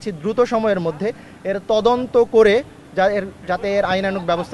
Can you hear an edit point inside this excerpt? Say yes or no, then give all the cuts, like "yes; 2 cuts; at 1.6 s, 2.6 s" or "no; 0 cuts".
no; 0 cuts